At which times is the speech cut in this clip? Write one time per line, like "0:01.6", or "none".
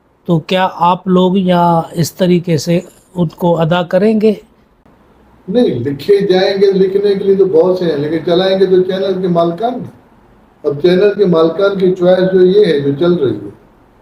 none